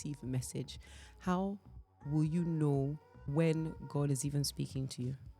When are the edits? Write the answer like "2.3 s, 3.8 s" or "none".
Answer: 3.3 s